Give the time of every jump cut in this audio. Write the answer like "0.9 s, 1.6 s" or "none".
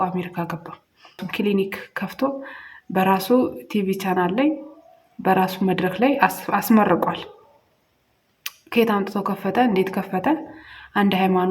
1.2 s